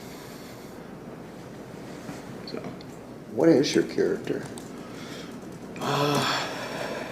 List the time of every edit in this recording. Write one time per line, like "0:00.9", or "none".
0:03.3

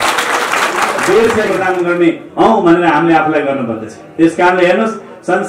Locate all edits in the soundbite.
0:01.5

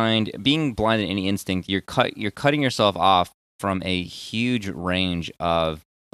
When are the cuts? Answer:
none

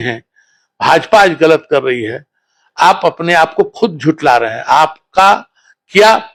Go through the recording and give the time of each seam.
none

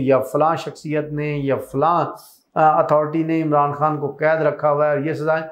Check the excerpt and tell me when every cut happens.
none

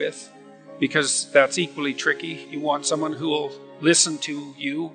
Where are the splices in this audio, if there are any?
0:02.3

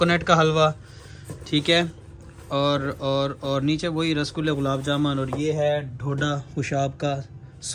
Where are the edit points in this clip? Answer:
none

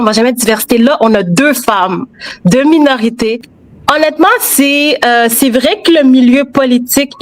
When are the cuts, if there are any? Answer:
0:03.5

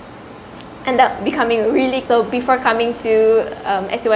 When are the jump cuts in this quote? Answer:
0:02.0

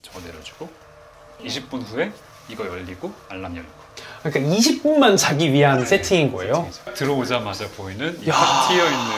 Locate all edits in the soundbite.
0:06.9

